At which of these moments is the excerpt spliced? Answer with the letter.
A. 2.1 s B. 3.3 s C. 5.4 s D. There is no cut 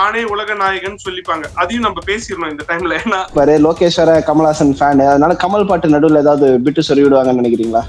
B